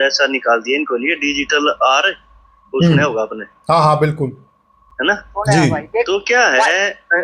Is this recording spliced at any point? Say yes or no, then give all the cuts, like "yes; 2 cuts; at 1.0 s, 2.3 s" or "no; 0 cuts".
no; 0 cuts